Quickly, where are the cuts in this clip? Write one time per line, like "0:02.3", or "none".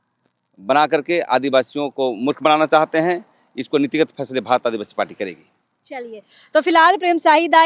none